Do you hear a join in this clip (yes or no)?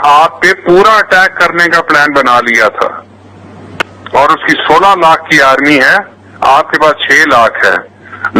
no